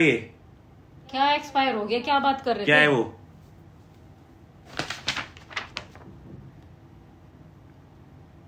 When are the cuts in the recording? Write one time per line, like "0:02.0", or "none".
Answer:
none